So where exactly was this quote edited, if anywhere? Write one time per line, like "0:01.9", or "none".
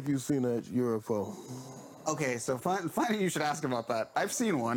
none